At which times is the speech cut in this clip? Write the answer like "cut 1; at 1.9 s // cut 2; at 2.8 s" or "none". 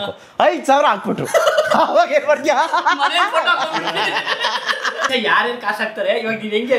cut 1; at 5.0 s